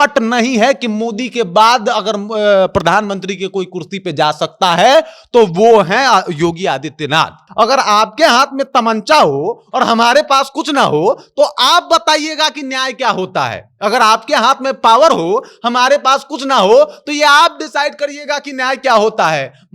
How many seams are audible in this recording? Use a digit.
1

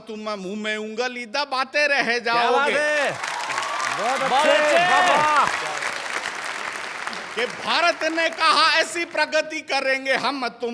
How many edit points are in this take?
0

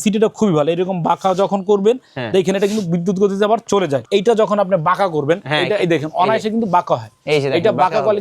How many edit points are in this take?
1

